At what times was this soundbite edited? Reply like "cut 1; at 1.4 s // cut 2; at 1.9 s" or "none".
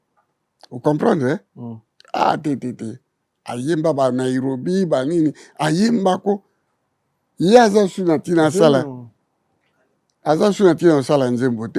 none